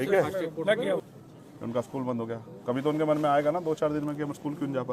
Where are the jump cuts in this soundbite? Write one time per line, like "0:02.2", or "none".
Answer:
0:01.0